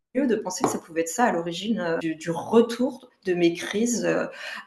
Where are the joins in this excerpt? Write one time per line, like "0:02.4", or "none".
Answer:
0:02.0